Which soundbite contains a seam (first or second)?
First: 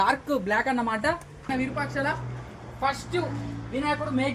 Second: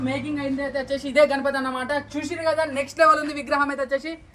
first